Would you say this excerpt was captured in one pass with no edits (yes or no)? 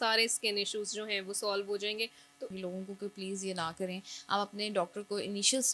no